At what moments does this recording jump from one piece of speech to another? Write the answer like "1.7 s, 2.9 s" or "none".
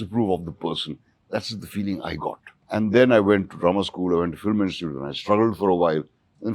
2.5 s